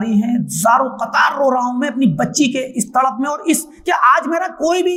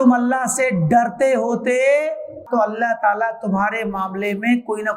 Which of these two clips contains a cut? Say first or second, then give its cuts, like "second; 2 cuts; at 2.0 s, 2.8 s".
second; 1 cut; at 2.5 s